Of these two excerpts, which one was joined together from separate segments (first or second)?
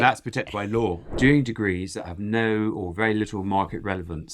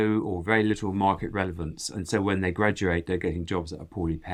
first